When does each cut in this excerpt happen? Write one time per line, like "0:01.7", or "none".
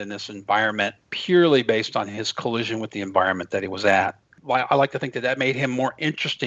0:01.1
0:04.4